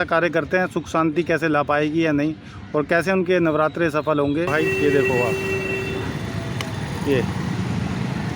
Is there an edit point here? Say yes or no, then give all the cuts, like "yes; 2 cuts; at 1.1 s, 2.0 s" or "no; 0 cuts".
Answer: yes; 1 cut; at 4.5 s